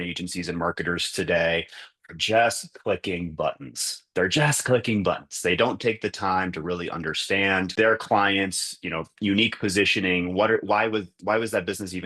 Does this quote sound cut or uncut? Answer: uncut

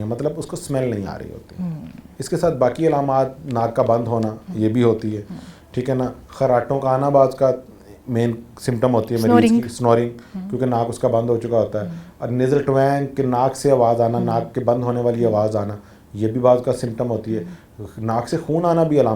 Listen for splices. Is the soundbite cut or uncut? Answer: uncut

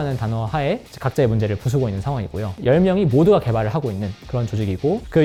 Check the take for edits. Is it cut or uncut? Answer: uncut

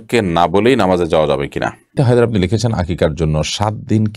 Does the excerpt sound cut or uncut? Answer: cut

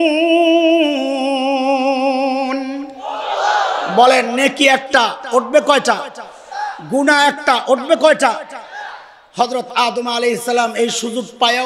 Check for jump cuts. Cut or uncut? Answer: uncut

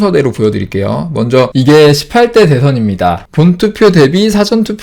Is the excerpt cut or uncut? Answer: cut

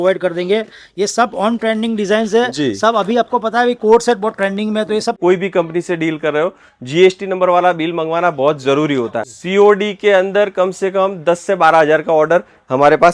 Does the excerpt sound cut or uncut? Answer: cut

